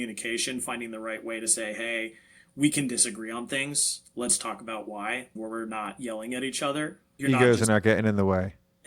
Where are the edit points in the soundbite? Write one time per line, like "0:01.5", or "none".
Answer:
0:05.3
0:07.1